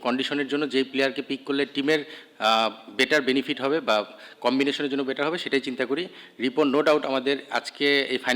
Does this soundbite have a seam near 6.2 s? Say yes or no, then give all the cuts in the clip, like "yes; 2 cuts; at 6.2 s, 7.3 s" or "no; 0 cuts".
no; 0 cuts